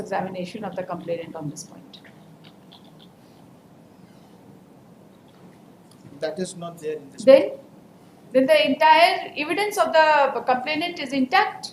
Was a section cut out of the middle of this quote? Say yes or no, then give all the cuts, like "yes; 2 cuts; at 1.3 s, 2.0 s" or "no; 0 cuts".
no; 0 cuts